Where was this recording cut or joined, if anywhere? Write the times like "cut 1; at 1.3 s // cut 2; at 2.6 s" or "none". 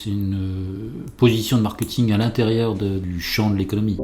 cut 1; at 3.0 s